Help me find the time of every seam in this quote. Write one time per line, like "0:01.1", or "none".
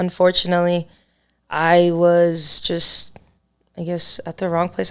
none